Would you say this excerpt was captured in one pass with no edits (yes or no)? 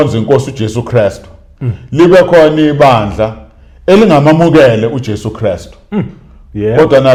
yes